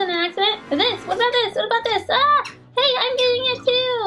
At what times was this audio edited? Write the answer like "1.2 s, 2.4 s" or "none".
none